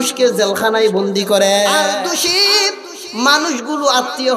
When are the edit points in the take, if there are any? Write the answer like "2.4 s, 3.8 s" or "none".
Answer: 1.9 s

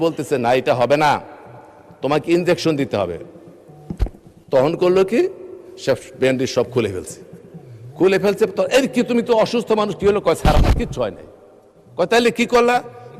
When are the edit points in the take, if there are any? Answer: none

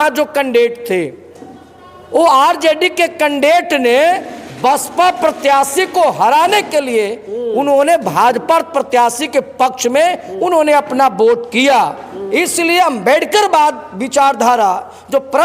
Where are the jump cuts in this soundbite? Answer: 12.2 s

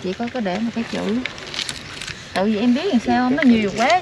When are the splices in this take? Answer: none

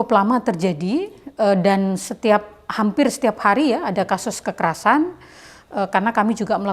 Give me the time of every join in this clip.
none

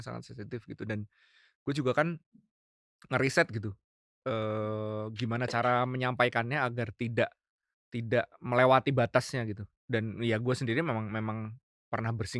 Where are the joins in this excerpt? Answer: none

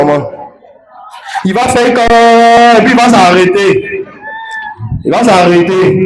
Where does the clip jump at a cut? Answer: 2.6 s

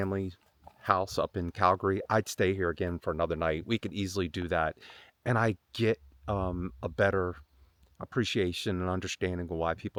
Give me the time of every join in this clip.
none

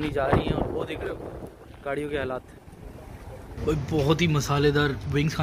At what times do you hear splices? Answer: 3.5 s

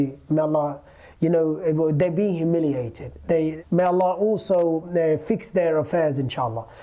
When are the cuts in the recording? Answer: none

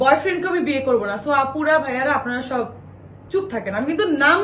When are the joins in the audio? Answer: none

